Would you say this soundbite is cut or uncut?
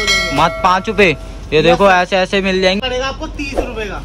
cut